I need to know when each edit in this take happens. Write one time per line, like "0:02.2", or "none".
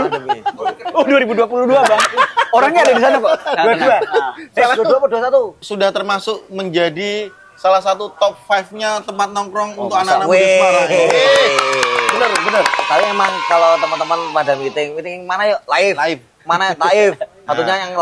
0:05.6

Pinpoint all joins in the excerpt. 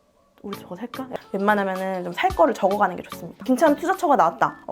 0:01.1
0:03.4

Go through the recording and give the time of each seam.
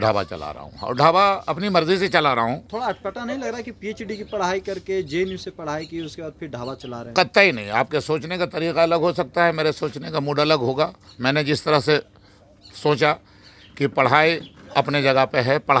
none

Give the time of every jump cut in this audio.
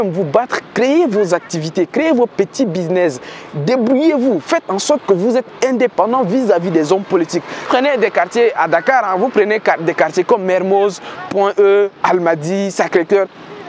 0:07.7

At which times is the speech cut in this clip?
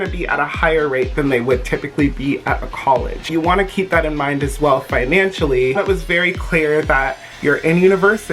0:03.2
0:05.8
0:07.3

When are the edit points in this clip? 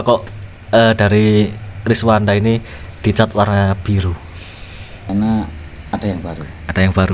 0:05.1

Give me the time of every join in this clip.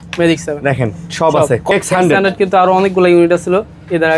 0:01.7

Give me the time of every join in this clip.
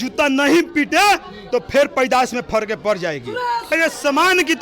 0:03.7

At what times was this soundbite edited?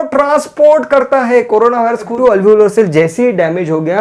0:02.1

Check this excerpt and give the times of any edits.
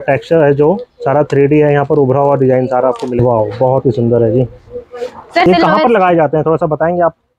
0:03.2
0:05.4

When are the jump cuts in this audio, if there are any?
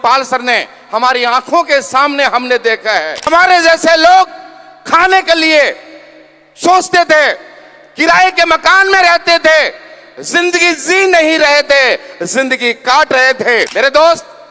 0:03.3
0:13.7

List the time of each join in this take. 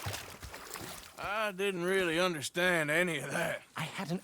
0:01.1

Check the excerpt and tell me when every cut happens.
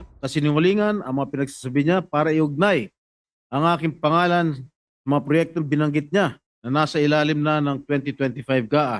none

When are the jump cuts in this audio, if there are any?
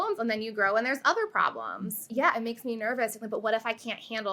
none

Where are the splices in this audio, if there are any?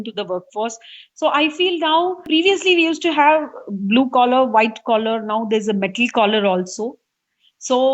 0:02.3

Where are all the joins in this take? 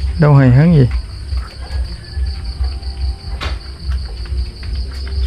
none

